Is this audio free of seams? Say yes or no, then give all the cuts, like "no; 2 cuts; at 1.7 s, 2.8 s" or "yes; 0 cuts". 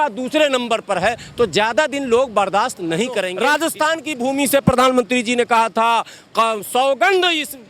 no; 1 cut; at 3.3 s